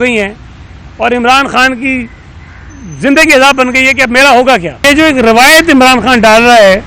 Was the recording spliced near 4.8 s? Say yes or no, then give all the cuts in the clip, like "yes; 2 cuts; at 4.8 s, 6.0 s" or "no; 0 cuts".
yes; 1 cut; at 4.8 s